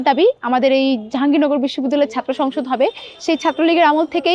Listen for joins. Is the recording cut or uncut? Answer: uncut